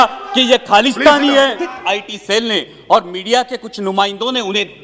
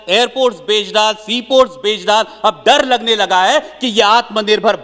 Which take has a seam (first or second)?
first